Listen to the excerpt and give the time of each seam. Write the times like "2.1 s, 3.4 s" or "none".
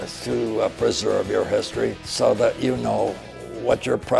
2.0 s, 3.2 s

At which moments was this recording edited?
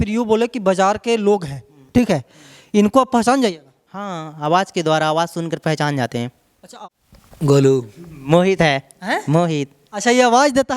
6.7 s

